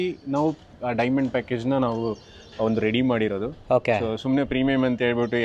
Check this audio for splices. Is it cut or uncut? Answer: uncut